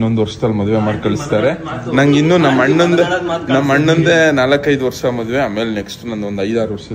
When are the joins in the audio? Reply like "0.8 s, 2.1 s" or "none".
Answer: none